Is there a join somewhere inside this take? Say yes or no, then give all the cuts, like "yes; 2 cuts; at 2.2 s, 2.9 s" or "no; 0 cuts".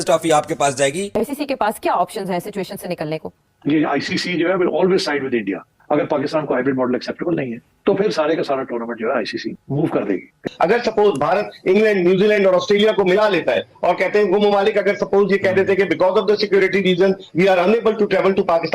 yes; 4 cuts; at 1.0 s, 3.4 s, 5.7 s, 10.5 s